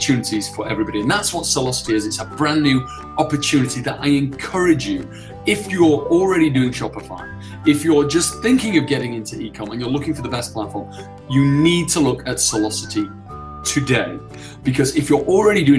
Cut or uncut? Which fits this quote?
uncut